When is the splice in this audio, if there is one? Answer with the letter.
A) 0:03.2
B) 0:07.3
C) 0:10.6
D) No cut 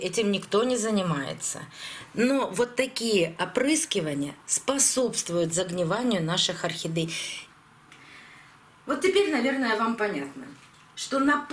B